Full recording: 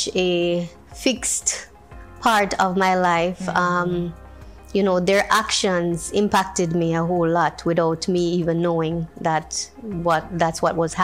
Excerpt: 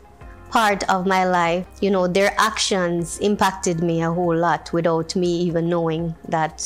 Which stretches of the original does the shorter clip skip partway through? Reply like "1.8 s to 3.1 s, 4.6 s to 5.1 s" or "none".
3.4 s to 4.6 s